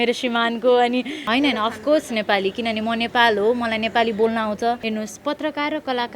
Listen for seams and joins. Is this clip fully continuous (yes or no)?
no